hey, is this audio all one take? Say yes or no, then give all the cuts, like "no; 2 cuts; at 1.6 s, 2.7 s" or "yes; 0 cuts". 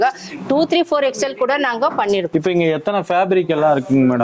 no; 1 cut; at 2.3 s